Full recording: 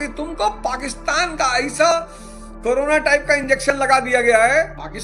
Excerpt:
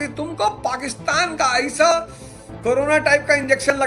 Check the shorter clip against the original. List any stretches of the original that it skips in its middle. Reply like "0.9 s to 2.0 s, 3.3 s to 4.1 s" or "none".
none